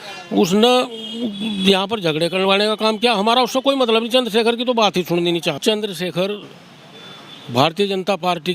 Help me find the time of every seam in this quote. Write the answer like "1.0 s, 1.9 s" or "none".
5.6 s